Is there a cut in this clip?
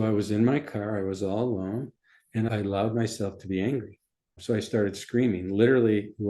yes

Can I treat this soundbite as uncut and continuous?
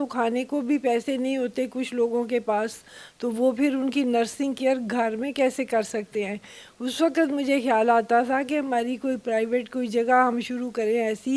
yes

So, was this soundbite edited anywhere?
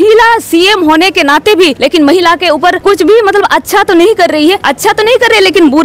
yes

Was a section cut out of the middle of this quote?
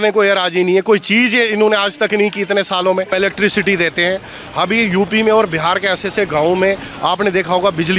yes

